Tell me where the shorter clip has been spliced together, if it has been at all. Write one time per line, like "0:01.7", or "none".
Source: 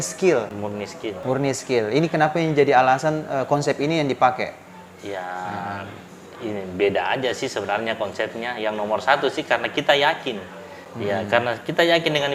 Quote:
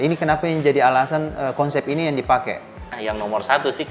0:02.9